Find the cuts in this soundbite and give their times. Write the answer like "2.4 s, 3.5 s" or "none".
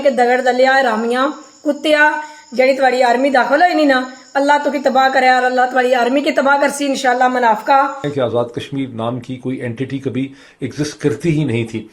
8.1 s

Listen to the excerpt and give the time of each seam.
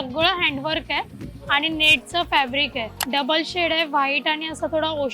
3.0 s

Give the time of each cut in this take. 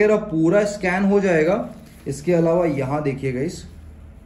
none

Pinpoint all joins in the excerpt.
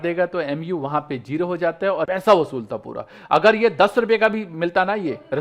2.1 s

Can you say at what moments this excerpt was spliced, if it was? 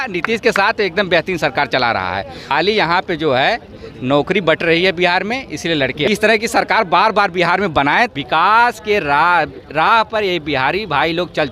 2.4 s, 6.1 s, 8.1 s

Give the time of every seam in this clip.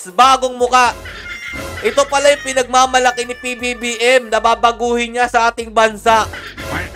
none

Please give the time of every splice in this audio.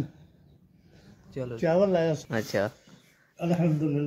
2.2 s

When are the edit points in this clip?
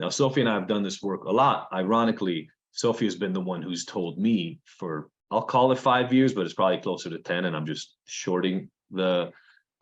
5.1 s

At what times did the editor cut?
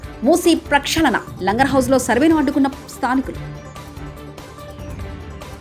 none

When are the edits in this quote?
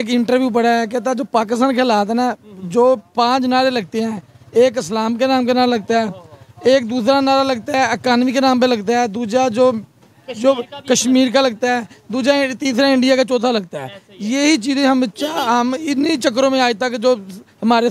none

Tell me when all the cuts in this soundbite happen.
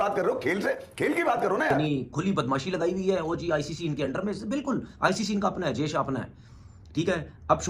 1.8 s

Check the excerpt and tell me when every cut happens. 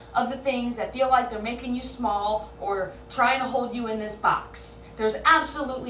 none

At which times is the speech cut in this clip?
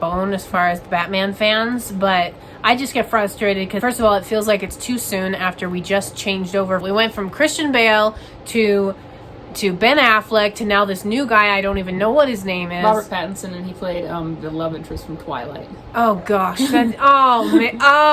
3.7 s, 6.8 s

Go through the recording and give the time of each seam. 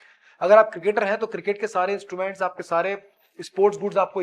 none

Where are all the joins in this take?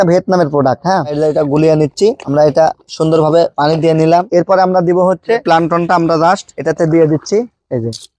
1.1 s, 4.3 s, 5.4 s

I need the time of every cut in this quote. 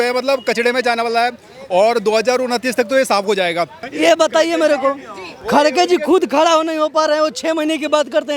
3.8 s

